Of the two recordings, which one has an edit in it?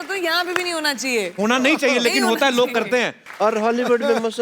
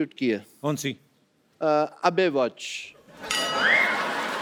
first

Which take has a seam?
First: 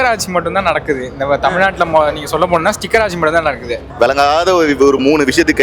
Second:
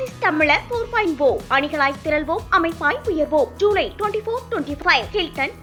first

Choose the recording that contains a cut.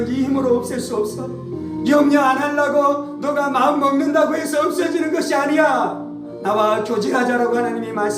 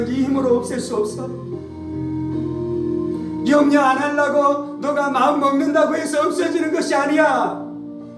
first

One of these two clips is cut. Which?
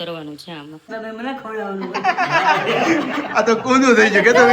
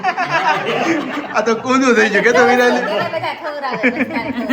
first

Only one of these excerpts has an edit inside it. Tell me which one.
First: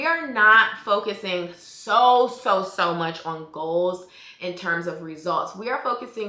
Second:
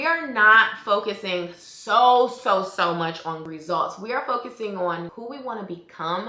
second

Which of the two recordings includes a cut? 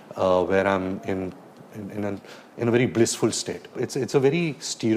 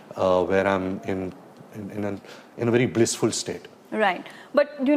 first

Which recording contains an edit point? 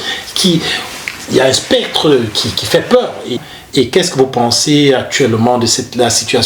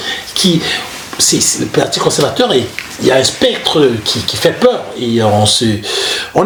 first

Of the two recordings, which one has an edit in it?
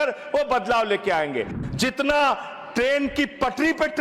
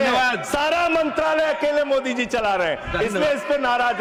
first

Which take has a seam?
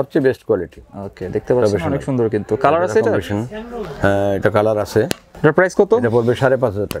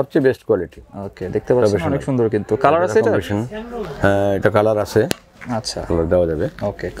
first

